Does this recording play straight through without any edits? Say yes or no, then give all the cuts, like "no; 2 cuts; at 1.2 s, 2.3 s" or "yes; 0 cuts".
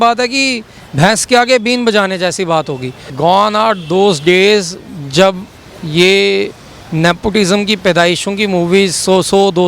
no; 1 cut; at 3.1 s